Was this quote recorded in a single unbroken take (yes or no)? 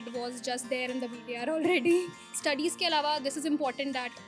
no